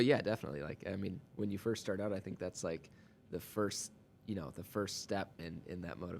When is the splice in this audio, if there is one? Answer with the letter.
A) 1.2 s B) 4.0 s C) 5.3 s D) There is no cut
A